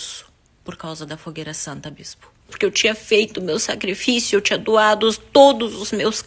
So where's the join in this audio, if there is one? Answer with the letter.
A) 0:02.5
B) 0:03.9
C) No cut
A